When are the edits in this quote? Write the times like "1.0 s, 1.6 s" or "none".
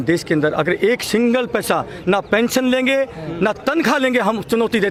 none